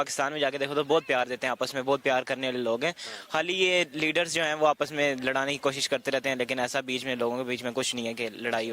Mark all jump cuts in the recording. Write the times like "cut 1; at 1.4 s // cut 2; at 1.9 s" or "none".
cut 1; at 1.7 s